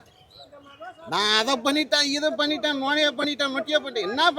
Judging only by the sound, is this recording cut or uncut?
uncut